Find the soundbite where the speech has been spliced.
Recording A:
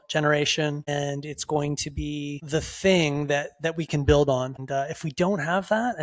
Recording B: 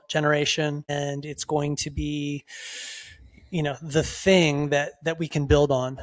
A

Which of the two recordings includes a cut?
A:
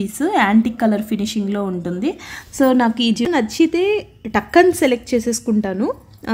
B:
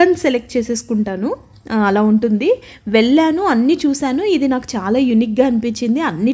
A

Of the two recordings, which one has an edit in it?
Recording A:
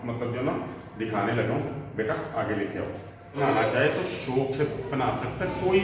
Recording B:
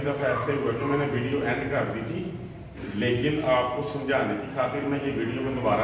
A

